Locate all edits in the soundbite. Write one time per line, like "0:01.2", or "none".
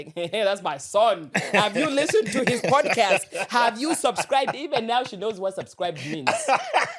none